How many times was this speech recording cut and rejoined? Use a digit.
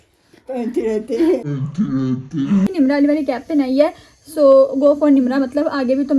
1